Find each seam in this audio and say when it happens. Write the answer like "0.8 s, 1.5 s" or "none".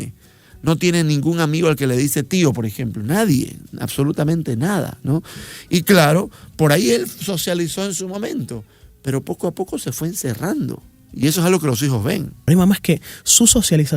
12.3 s